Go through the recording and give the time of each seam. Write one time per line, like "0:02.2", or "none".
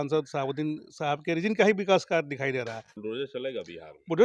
0:03.0